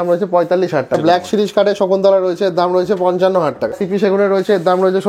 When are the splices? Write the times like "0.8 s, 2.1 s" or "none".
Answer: 1.0 s, 3.8 s